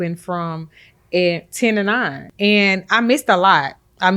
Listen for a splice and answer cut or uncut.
cut